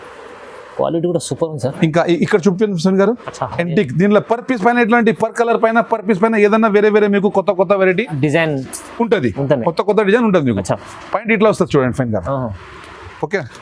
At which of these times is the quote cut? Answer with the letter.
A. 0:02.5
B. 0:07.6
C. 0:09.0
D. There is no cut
D